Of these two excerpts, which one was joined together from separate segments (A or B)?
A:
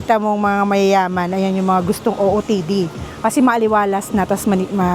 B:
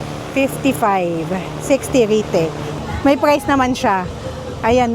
B